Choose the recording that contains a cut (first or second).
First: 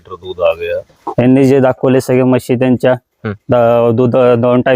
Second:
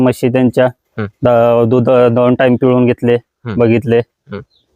first